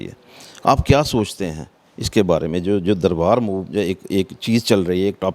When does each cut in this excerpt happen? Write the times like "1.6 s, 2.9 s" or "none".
none